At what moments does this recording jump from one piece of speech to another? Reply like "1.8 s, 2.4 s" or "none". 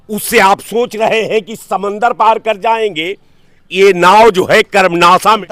none